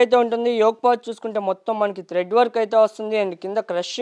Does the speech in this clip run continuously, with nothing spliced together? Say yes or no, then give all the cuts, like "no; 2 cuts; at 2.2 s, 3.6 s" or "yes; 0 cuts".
yes; 0 cuts